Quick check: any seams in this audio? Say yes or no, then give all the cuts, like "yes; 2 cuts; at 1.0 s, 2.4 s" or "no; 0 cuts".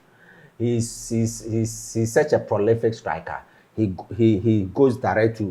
no; 0 cuts